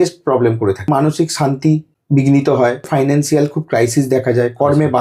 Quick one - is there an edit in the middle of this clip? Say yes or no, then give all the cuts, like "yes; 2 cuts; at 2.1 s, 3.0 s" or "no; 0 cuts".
yes; 3 cuts; at 0.9 s, 1.9 s, 2.9 s